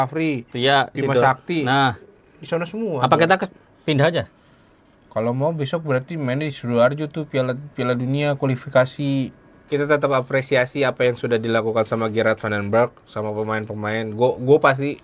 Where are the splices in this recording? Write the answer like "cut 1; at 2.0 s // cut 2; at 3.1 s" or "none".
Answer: cut 1; at 9.5 s

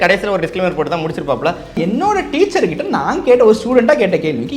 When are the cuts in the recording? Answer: cut 1; at 1.8 s

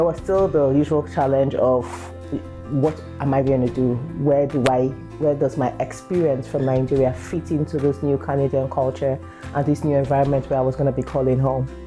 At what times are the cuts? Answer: none

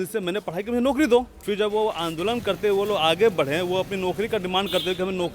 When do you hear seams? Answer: cut 1; at 1.4 s

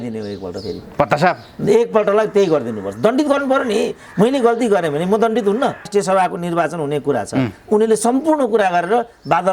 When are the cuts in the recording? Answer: cut 1; at 5.9 s

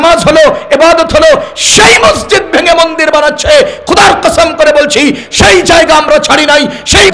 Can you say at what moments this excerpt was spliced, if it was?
none

